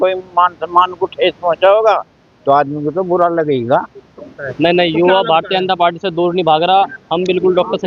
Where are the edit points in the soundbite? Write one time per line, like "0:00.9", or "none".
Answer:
0:04.4